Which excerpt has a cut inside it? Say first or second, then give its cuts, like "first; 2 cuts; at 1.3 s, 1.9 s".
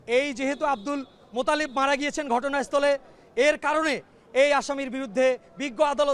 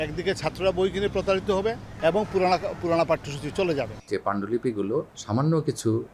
second; 3 cuts; at 1.9 s, 4.0 s, 5.2 s